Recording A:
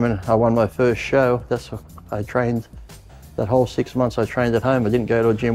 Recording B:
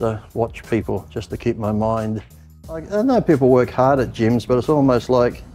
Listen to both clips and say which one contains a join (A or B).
B